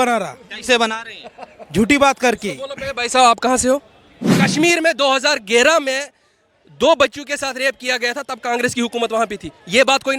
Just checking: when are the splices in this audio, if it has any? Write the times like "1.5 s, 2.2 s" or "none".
4.4 s